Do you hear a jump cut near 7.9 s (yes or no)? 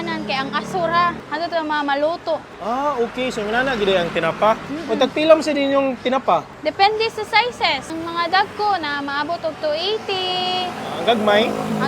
yes